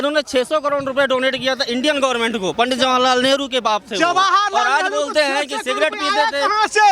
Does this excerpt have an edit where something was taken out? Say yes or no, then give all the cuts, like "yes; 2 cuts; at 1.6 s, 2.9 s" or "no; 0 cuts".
no; 0 cuts